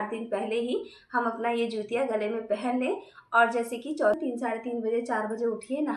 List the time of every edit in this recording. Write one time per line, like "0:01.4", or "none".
0:04.2